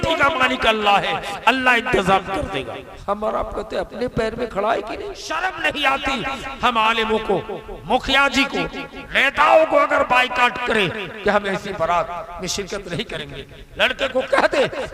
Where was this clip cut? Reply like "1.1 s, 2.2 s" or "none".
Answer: 2.9 s, 5.2 s